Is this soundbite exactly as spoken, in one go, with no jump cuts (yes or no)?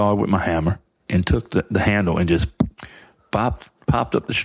no